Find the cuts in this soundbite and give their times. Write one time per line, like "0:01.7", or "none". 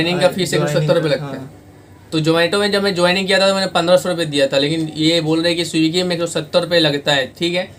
none